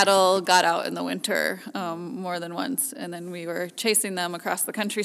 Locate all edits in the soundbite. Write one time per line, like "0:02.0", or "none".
none

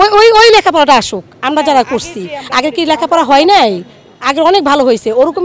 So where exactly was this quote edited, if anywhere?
none

